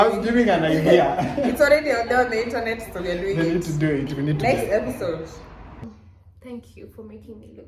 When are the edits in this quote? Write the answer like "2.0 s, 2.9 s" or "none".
5.8 s